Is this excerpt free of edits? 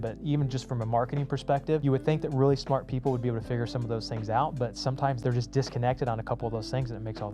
no; 2 cuts; at 1.8 s, 5.2 s

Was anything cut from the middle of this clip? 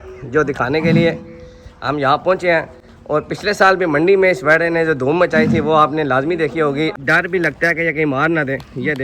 yes; 1 cut; at 7.0 s

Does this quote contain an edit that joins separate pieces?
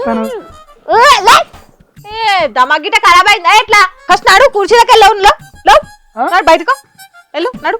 yes; 1 cut; at 4.0 s

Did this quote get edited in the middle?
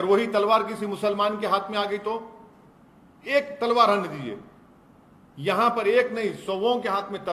no; 0 cuts

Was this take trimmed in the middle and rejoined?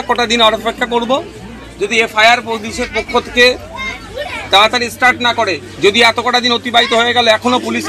no; 0 cuts

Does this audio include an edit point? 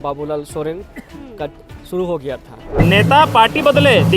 yes; 1 cut; at 2.7 s

